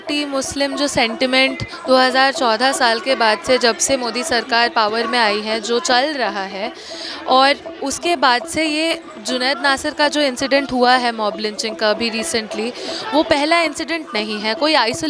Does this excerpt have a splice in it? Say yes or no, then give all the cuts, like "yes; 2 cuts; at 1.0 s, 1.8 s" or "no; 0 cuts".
no; 0 cuts